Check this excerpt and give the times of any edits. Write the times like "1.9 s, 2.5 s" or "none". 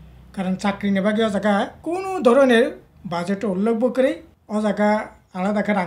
1.8 s, 4.3 s